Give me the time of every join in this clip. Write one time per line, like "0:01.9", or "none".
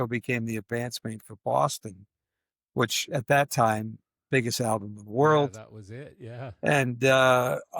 none